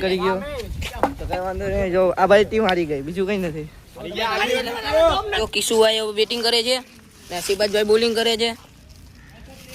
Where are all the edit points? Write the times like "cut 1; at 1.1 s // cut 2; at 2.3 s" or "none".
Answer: cut 1; at 5.5 s